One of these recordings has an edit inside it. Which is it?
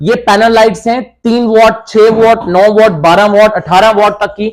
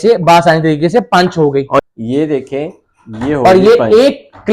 second; 1 cut; at 1.8 s

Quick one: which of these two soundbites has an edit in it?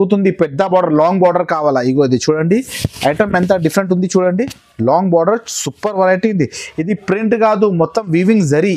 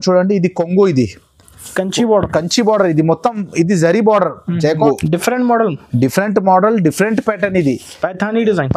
second; 1 cut; at 4.9 s

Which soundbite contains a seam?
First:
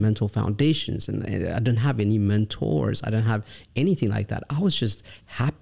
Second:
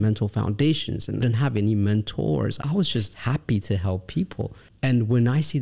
second; 3 cuts; at 1.2 s, 2.7 s, 4.6 s

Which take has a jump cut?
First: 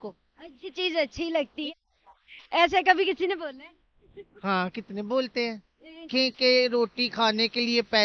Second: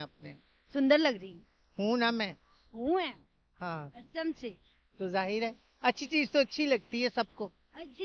first; 2 cuts; at 1.7 s, 6.1 s

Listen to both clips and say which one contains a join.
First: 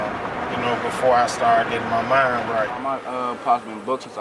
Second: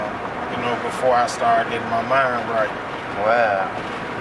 first; 1 cut; at 2.8 s

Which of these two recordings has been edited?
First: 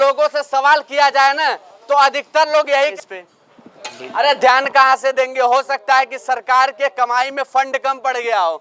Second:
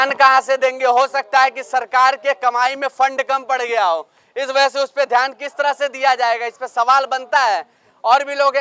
first; 1 cut; at 2.9 s

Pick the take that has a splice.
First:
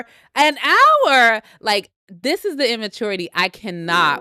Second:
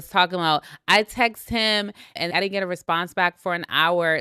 second; 1 cut; at 2.3 s

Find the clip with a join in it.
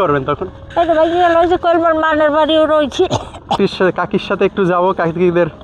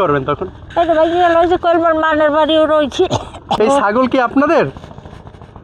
second; 1 cut; at 3.6 s

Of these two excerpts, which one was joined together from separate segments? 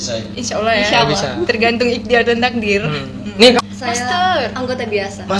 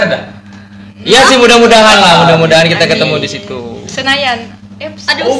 first; 1 cut; at 3.6 s

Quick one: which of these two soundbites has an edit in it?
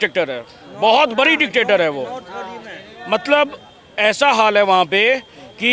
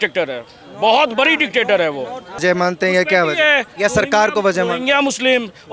second; 1 cut; at 2.4 s

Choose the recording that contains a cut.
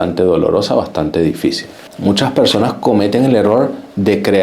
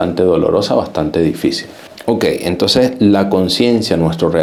first; 1 cut; at 1.8 s

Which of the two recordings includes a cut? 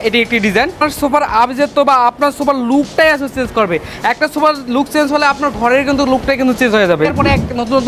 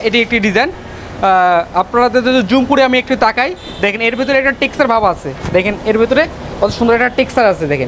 first; 2 cuts; at 0.9 s, 7.1 s

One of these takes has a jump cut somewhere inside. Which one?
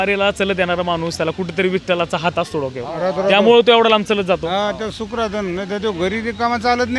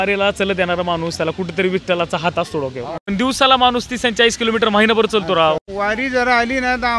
second; 2 cuts; at 2.9 s, 5.7 s

